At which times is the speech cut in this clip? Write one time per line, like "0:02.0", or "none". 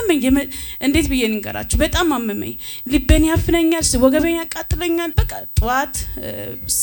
0:05.2